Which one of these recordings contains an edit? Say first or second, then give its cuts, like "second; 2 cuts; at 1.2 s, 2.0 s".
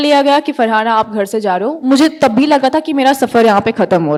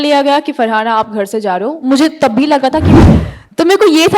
second; 1 cut; at 3.0 s